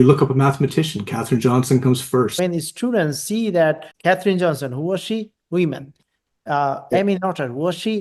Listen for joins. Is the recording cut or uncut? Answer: cut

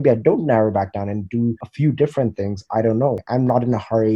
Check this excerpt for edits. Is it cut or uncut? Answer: cut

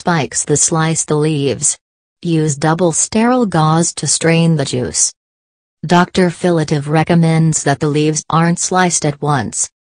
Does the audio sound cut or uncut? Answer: uncut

